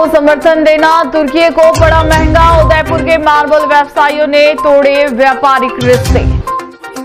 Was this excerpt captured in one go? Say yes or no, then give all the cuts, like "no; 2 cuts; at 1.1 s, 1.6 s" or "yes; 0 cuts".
yes; 0 cuts